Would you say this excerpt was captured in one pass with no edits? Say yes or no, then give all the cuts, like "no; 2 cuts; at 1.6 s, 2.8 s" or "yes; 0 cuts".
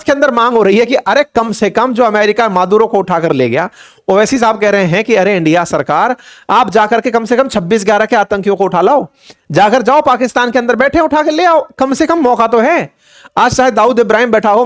yes; 0 cuts